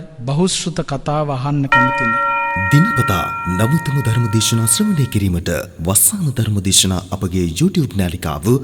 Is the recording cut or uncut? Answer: cut